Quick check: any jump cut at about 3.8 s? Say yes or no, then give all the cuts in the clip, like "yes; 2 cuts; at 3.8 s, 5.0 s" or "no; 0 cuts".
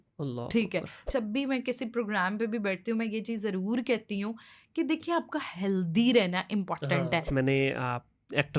no; 2 cuts; at 1.1 s, 7.3 s